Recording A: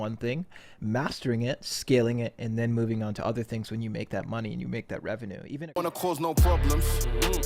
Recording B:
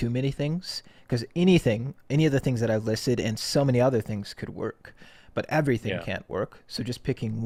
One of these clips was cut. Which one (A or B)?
A